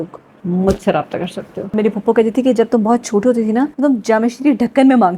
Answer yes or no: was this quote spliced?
yes